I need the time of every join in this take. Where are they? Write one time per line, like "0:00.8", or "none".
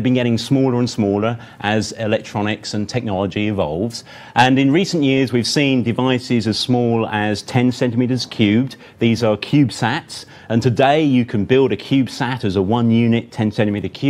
0:02.3